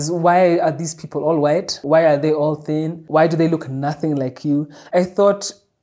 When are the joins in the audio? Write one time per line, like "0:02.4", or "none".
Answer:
0:01.8
0:03.0
0:04.8